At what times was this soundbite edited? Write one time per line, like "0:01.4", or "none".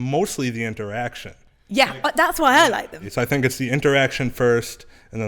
0:03.0